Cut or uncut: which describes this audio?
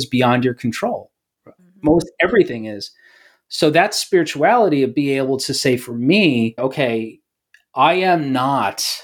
cut